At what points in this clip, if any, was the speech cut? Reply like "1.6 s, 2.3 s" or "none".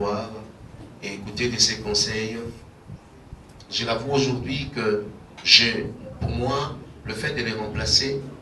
none